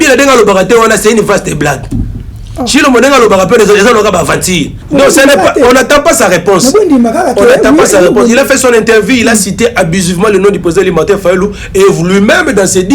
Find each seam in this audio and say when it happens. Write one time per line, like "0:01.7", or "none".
0:04.8